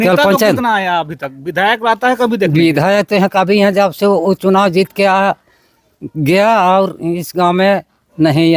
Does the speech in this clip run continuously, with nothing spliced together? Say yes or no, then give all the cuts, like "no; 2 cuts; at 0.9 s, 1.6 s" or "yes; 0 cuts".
yes; 0 cuts